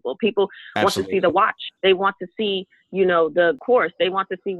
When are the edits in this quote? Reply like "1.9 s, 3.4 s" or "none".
1.6 s, 3.6 s